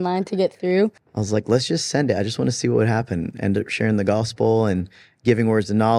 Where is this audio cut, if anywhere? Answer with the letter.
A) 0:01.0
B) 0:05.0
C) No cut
A